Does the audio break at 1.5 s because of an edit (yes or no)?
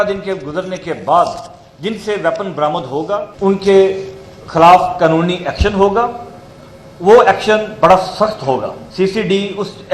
no